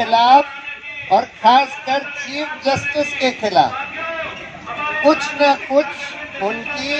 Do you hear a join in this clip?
no; 0 cuts

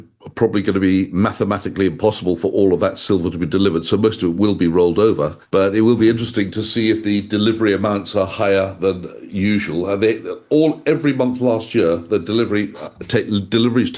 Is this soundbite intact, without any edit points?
no; 1 cut; at 5.4 s

